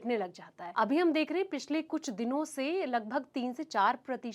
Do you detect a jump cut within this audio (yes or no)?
no